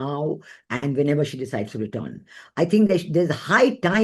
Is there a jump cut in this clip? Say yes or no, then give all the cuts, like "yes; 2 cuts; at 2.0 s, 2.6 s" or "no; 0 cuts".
no; 0 cuts